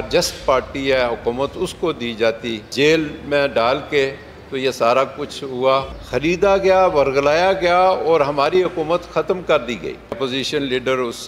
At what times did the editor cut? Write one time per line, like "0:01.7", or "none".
0:02.6
0:06.0
0:10.2